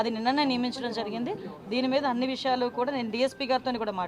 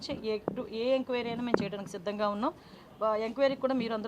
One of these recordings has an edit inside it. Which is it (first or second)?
second